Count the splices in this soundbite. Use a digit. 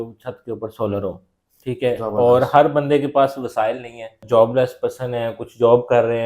1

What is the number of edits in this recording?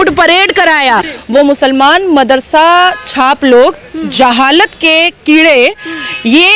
1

